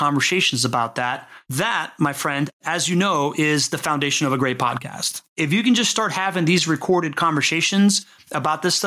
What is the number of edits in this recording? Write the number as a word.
one